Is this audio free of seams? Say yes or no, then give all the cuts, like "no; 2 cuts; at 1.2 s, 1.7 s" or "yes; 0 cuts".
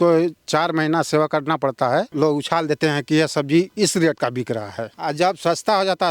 no; 2 cuts; at 2.1 s, 4.9 s